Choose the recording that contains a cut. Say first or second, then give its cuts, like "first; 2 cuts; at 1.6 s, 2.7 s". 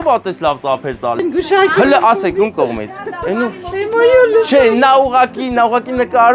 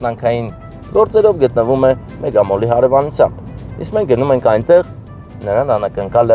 first; 1 cut; at 1.2 s